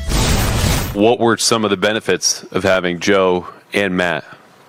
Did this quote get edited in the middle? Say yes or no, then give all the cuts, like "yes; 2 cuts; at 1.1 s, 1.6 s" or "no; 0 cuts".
yes; 1 cut; at 0.9 s